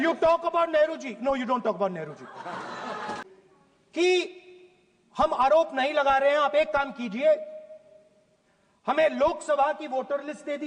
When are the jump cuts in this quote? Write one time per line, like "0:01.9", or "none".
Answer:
0:03.2

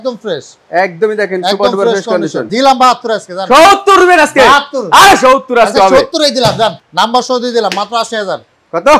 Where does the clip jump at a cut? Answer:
0:02.5
0:06.8

